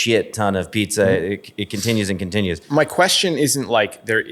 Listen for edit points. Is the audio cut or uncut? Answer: cut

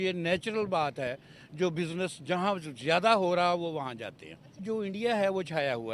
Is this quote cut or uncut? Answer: cut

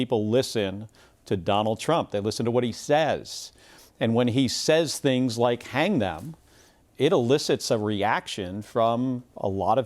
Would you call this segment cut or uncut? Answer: uncut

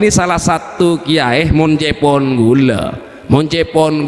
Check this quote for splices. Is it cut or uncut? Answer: uncut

